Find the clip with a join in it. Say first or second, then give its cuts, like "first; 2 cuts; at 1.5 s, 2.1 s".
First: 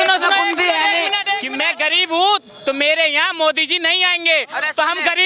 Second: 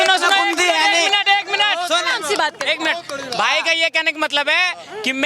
first; 1 cut; at 1.5 s